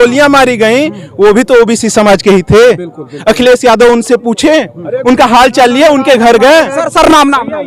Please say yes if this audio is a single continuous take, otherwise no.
yes